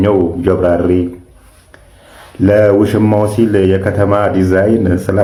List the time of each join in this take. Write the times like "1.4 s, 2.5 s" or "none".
none

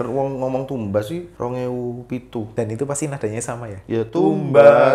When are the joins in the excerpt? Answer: 1.3 s, 2.5 s

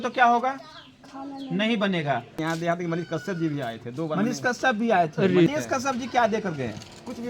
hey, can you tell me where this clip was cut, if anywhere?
2.3 s, 5.5 s

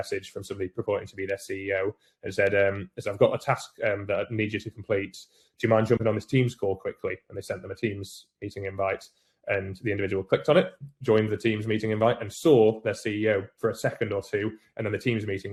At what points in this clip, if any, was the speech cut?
none

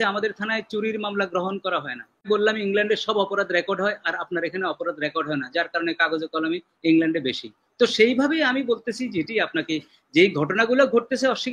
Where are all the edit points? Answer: 2.2 s

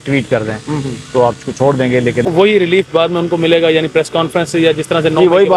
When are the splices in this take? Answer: 2.3 s

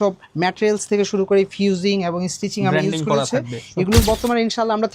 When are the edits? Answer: 4.0 s

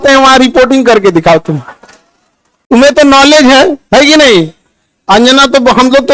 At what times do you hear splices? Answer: none

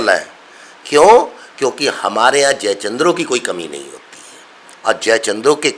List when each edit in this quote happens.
none

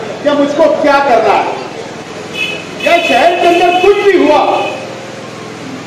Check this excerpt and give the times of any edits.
2.0 s

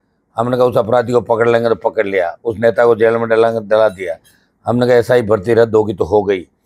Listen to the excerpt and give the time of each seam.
none

